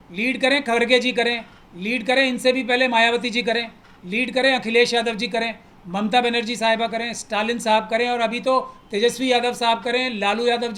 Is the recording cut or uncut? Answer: uncut